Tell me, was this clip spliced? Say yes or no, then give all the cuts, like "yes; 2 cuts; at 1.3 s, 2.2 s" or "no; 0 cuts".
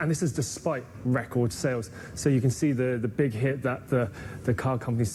no; 0 cuts